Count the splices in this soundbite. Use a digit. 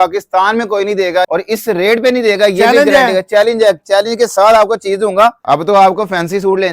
2